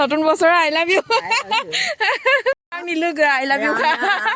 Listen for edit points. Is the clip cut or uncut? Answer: uncut